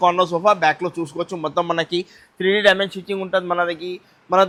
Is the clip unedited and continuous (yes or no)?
yes